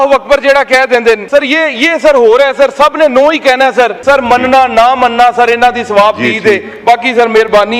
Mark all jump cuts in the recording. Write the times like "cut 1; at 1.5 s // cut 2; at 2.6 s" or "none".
cut 1; at 1.2 s // cut 2; at 4.0 s